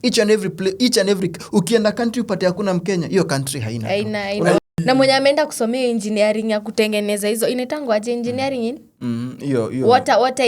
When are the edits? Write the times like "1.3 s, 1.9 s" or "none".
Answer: 4.6 s